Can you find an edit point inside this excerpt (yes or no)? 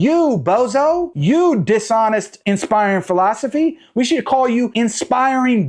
no